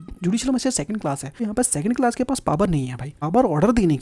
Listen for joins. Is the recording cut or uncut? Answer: cut